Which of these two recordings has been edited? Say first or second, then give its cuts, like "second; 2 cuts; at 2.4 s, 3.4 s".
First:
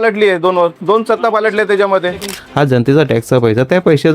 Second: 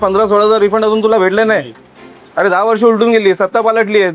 first; 1 cut; at 2.2 s